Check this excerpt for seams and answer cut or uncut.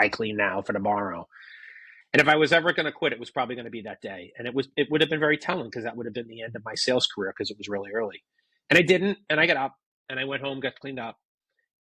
uncut